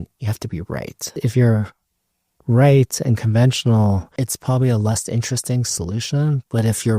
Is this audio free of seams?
no; 1 cut; at 4.2 s

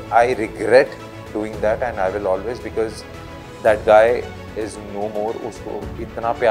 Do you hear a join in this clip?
no; 0 cuts

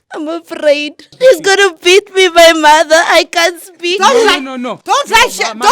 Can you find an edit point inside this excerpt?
yes; 1 cut; at 1.1 s

